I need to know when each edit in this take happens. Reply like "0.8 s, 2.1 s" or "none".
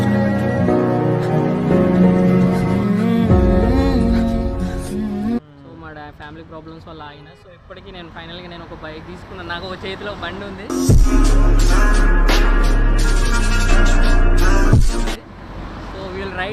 none